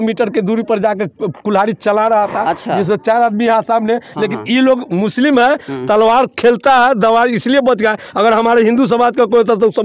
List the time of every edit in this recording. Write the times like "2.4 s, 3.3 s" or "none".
none